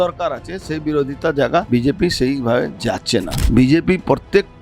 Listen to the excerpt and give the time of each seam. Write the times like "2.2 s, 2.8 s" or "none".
1.7 s, 3.4 s